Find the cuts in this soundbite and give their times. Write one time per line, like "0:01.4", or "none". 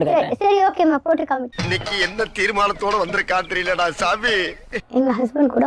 0:04.7